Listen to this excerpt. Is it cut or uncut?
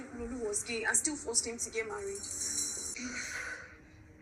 cut